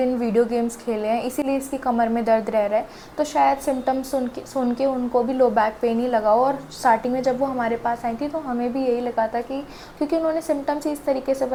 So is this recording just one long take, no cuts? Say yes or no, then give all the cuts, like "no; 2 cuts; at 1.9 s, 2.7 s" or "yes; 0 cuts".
yes; 0 cuts